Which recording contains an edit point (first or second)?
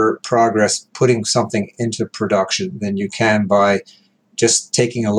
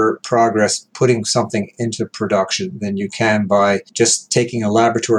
second